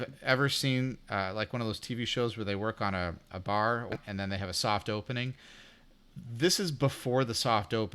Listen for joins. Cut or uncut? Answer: cut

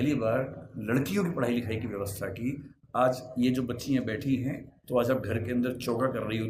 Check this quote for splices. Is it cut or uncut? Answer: cut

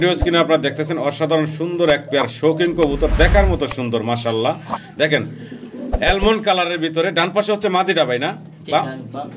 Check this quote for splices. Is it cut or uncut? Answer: uncut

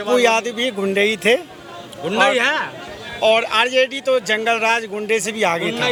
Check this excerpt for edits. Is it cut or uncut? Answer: uncut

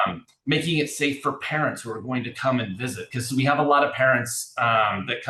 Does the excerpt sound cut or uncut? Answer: uncut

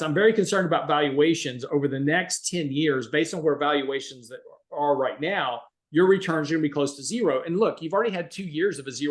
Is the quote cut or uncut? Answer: uncut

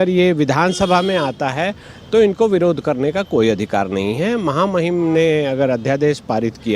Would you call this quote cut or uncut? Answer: uncut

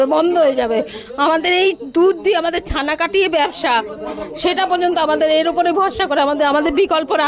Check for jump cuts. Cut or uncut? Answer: uncut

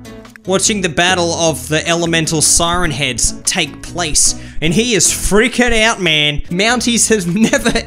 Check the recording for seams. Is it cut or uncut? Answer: uncut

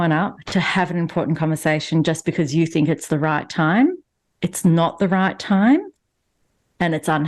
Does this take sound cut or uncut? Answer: uncut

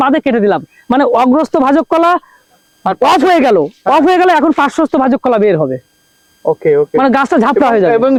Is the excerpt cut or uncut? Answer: uncut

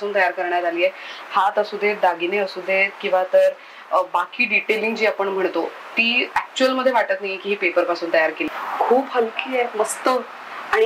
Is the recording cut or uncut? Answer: cut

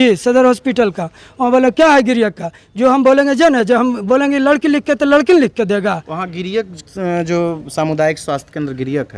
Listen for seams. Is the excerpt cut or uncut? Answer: uncut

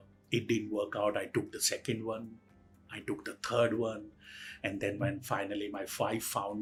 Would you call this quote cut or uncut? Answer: uncut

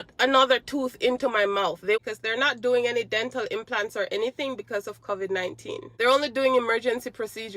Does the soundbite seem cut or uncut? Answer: cut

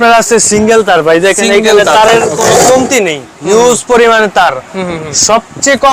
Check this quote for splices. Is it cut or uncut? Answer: uncut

